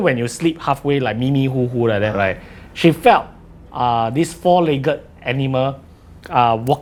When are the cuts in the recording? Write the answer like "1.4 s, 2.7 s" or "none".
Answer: none